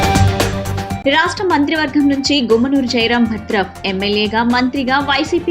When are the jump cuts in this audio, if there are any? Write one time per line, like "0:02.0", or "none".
0:01.0

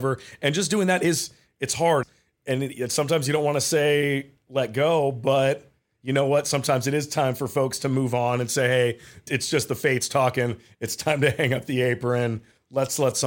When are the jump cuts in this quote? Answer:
0:09.3

